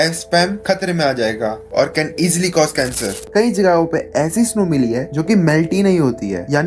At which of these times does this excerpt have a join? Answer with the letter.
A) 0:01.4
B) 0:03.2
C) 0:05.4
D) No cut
B